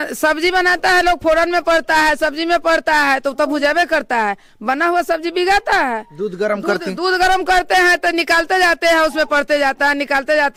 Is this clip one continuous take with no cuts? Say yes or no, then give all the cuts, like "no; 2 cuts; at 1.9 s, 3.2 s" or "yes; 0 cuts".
yes; 0 cuts